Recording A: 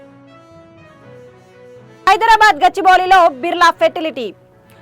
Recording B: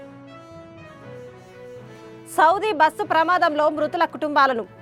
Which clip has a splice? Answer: B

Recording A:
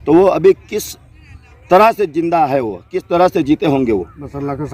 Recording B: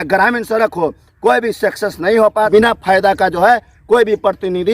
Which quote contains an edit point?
B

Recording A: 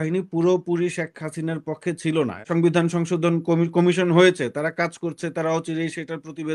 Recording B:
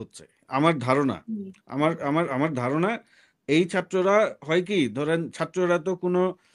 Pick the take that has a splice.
A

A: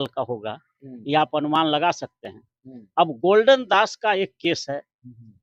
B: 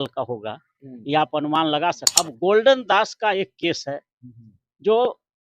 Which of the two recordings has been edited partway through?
B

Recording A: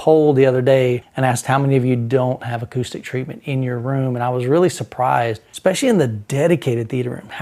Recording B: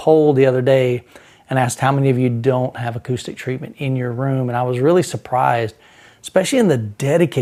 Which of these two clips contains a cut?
A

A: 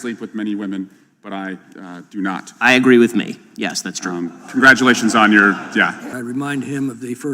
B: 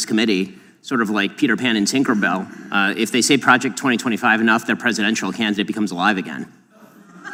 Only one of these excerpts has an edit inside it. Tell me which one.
A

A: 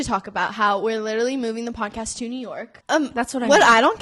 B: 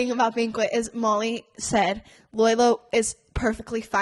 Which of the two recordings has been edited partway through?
A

